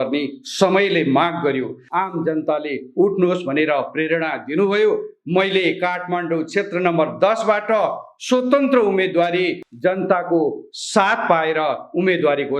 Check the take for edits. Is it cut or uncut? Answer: cut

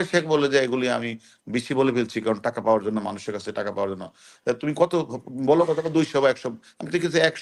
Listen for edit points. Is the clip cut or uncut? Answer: uncut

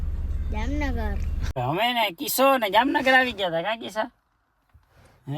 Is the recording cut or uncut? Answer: cut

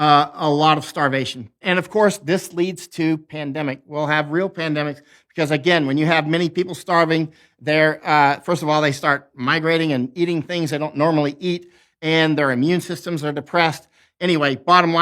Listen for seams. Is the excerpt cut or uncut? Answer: cut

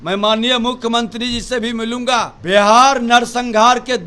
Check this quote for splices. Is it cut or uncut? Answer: cut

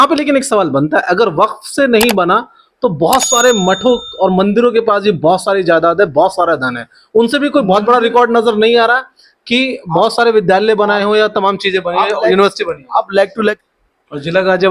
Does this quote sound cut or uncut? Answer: cut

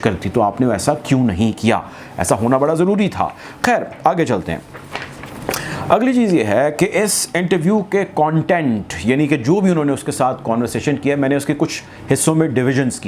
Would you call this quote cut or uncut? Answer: uncut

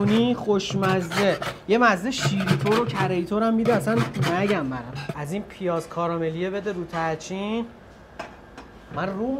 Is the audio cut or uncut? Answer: cut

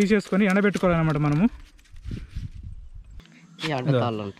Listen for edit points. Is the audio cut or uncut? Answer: cut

